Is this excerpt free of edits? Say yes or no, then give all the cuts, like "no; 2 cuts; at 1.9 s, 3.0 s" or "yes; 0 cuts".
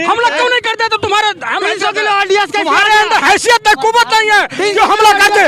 yes; 0 cuts